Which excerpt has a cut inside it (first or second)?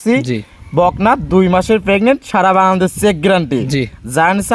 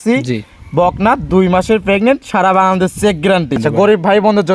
second